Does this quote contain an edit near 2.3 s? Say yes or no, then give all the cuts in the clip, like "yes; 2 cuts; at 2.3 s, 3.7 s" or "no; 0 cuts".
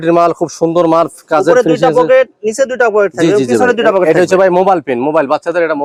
no; 0 cuts